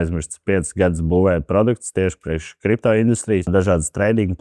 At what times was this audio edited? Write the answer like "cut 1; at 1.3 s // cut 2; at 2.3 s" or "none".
cut 1; at 3.5 s